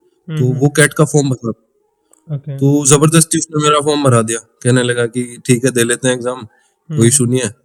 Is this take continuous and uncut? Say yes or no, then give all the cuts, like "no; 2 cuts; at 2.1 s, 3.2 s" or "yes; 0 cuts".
yes; 0 cuts